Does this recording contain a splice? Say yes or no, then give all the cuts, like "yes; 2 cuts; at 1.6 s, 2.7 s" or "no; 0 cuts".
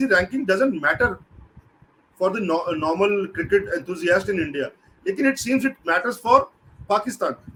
no; 0 cuts